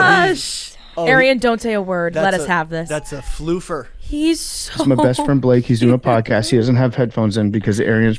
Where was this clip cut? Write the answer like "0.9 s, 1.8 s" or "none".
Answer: none